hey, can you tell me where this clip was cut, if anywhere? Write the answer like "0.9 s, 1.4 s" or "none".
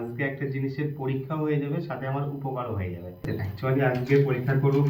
3.3 s